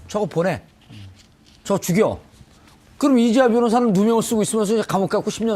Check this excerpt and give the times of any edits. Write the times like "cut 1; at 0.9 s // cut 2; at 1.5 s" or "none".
none